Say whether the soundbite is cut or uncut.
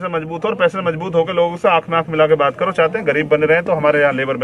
uncut